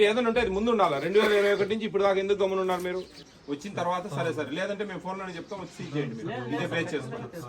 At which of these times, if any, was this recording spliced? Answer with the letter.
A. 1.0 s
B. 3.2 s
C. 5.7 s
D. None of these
B